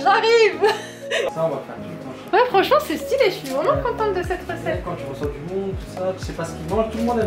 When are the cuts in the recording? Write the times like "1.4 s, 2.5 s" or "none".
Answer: 1.3 s

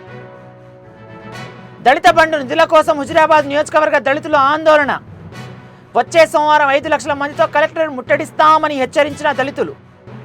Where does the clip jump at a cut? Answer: 1.5 s

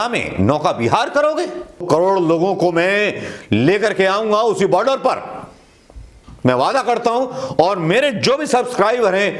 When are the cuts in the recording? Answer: 1.8 s

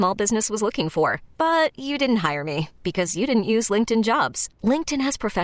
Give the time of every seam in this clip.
none

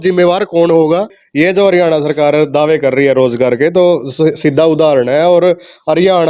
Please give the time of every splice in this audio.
1.2 s

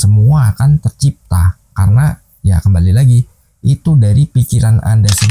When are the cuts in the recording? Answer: none

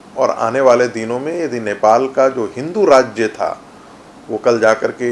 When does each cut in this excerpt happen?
none

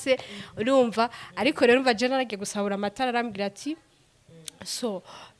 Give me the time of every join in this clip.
none

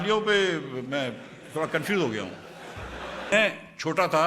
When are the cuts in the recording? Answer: 3.3 s

